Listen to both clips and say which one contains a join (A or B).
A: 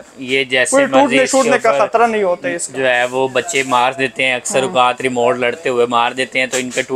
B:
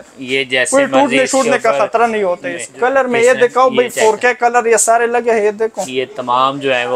B